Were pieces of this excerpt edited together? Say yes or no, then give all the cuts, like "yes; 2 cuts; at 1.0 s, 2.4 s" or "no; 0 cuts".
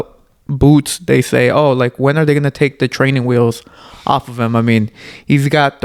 no; 0 cuts